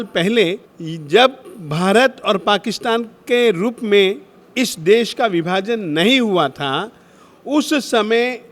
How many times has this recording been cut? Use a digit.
0